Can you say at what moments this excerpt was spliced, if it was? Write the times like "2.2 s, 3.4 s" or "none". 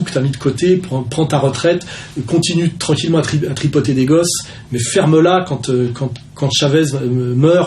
4.6 s